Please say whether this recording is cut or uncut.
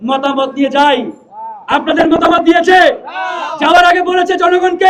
uncut